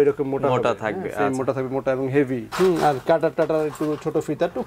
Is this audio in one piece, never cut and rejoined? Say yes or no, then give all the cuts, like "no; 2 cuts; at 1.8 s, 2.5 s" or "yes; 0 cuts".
no; 1 cut; at 2.5 s